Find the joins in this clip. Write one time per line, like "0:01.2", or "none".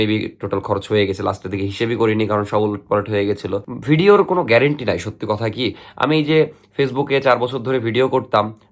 0:03.7